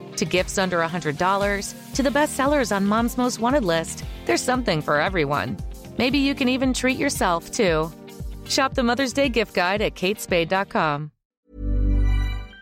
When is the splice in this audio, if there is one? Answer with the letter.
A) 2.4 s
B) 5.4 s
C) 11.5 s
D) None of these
C